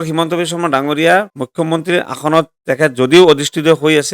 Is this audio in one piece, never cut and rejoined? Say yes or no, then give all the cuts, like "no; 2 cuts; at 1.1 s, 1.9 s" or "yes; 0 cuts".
no; 1 cut; at 1.4 s